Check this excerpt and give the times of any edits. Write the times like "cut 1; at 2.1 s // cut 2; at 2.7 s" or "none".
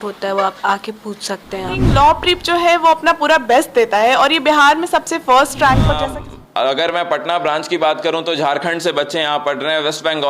cut 1; at 1.8 s // cut 2; at 6.0 s